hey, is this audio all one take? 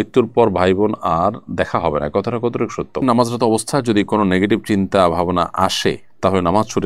no; 1 cut; at 3.0 s

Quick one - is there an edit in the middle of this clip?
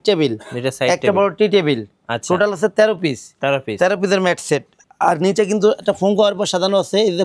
no; 0 cuts

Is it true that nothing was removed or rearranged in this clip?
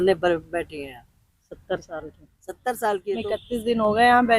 no; 1 cut; at 3.4 s

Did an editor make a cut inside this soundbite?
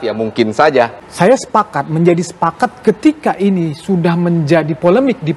yes; 1 cut; at 1.0 s

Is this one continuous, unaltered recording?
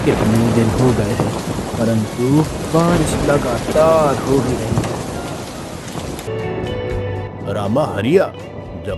no; 1 cut; at 6.3 s

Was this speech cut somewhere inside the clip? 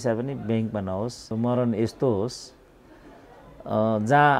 yes; 1 cut; at 1.2 s

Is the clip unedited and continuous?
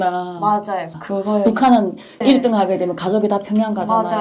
no; 2 cuts; at 0.9 s, 2.2 s

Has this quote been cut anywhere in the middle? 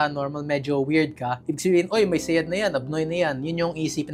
no; 0 cuts

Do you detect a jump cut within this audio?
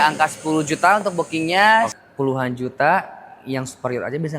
yes; 1 cut; at 1.9 s

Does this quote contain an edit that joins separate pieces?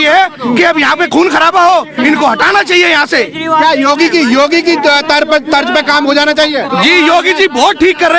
no; 0 cuts

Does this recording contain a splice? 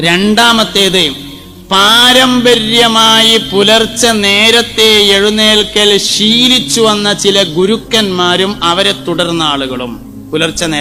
no; 0 cuts

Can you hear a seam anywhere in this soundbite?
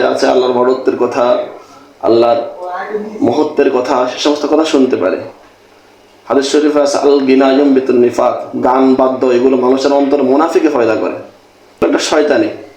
yes; 1 cut; at 11.8 s

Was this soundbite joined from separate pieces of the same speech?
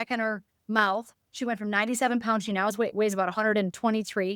no; 0 cuts

